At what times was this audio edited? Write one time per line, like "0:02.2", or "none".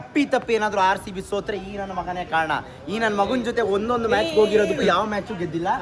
none